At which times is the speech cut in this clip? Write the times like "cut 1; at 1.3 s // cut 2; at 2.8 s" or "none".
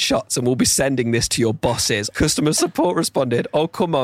cut 1; at 2.3 s